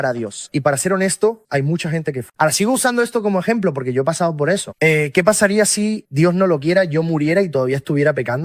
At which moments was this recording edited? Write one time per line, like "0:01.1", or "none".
0:02.3